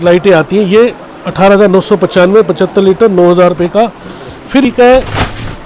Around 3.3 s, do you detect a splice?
no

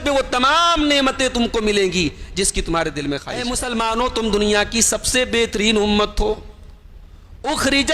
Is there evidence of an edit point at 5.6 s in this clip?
no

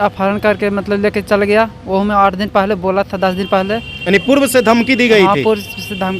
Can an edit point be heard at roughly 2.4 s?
no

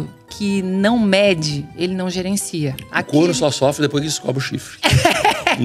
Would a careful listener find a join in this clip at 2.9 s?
no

